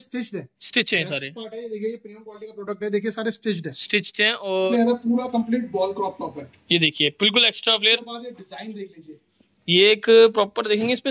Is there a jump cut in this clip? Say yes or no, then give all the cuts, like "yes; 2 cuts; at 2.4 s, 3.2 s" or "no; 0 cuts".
yes; 1 cut; at 4.7 s